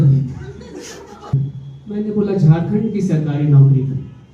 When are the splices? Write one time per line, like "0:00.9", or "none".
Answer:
0:01.3